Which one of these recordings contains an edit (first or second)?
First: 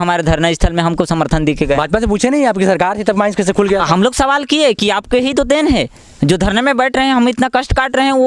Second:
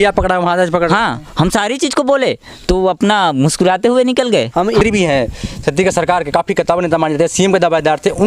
second